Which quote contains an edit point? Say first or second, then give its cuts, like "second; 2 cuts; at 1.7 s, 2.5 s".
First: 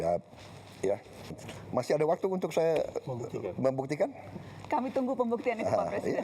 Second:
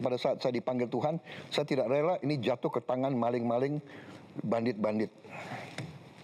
first; 1 cut; at 1.5 s